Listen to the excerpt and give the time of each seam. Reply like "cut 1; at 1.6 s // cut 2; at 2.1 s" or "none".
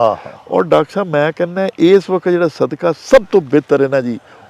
none